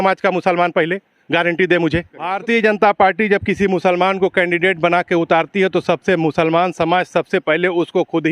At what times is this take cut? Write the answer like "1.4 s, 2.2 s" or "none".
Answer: 2.4 s